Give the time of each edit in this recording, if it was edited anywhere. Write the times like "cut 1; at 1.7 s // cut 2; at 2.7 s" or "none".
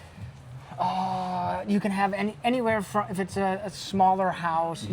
none